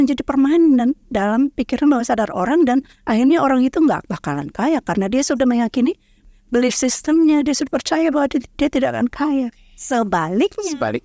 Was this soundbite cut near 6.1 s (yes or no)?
yes